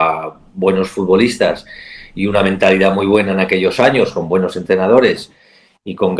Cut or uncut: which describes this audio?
uncut